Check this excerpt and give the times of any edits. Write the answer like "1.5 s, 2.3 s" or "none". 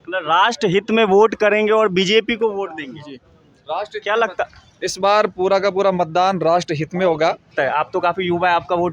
7.4 s